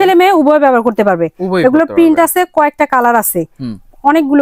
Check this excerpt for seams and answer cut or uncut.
uncut